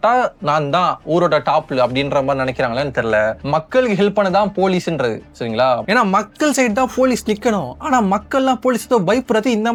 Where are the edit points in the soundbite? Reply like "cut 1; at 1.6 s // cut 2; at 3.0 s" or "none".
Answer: none